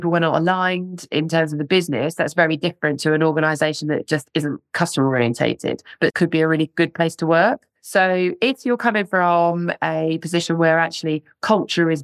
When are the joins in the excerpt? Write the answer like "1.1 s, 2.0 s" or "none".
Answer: 6.1 s